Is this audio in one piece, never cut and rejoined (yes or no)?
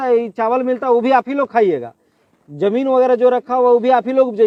yes